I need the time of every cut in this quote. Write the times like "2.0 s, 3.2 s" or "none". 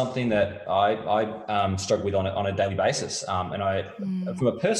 none